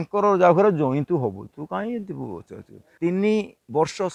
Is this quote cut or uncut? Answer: cut